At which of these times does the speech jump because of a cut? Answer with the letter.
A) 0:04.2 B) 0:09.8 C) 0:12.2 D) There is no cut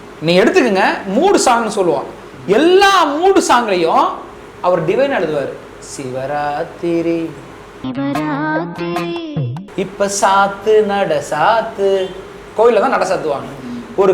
B